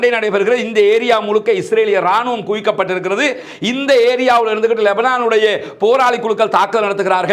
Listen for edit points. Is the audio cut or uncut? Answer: uncut